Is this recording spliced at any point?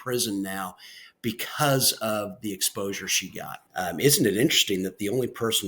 yes; 1 cut; at 3.6 s

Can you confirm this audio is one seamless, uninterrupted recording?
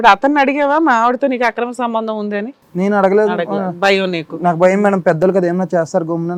yes; 0 cuts

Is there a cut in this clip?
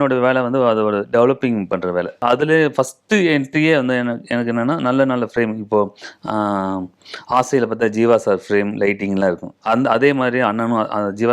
yes; 1 cut; at 2.2 s

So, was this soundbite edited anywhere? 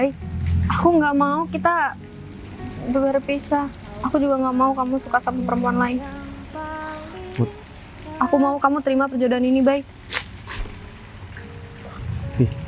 no; 0 cuts

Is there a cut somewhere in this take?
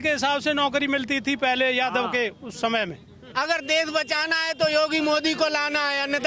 yes; 1 cut; at 3.2 s

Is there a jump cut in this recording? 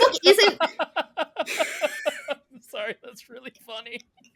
no; 0 cuts

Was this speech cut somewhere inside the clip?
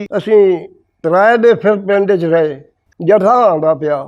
yes; 1 cut; at 3.0 s

